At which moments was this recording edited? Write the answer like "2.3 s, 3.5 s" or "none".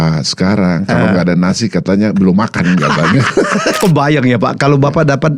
3.8 s